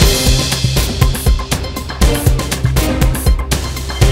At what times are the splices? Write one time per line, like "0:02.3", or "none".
none